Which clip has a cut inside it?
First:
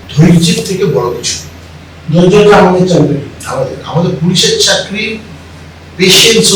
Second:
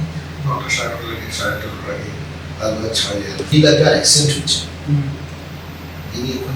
second; 1 cut; at 3.5 s

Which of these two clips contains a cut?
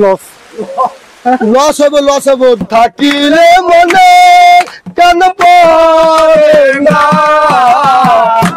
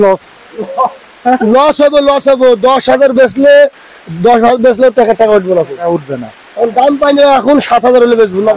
first; 1 cut; at 2.6 s

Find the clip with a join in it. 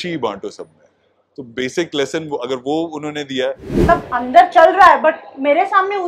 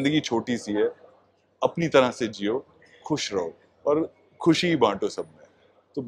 first; 1 cut; at 3.7 s

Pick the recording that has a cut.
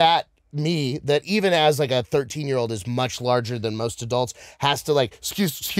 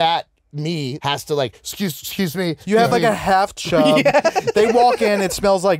second; 2 cuts; at 0.9 s, 2.6 s

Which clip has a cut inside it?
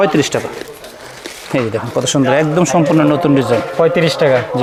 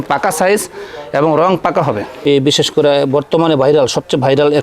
second; 1 cut; at 2.1 s

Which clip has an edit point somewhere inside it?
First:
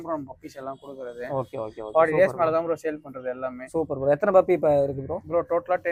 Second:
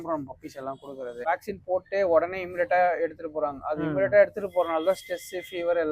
second; 1 cut; at 1.2 s

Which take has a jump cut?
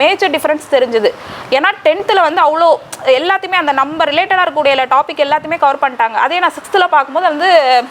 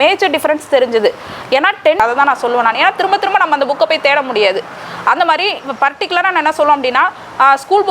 second; 1 cut; at 2.0 s

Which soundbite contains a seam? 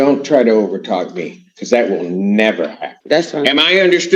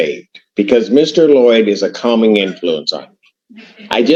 first; 1 cut; at 2.9 s

